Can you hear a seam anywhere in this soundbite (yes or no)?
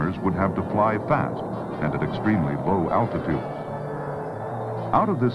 no